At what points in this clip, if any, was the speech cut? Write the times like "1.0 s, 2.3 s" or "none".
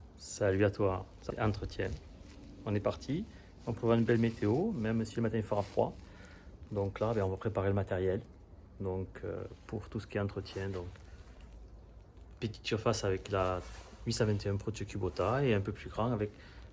1.1 s